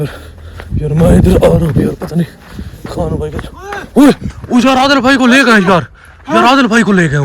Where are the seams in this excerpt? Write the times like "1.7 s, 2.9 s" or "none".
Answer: none